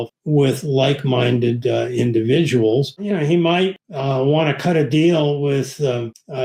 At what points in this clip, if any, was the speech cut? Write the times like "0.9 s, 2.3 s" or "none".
none